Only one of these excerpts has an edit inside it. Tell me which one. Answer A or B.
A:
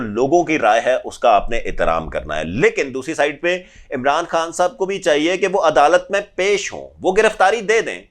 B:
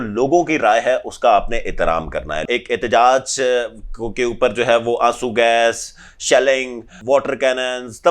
B